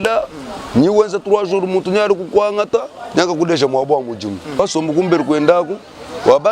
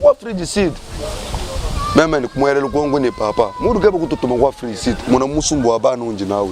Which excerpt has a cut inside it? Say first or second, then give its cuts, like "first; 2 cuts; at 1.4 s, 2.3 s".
first; 1 cut; at 4.6 s